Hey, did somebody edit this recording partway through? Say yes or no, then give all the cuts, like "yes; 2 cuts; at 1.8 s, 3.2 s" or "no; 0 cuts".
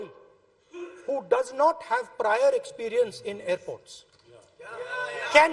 no; 0 cuts